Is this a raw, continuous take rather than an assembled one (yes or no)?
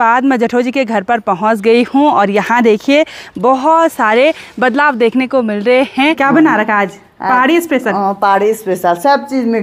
no